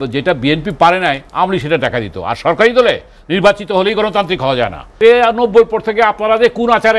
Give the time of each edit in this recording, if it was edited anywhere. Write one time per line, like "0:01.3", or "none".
0:04.8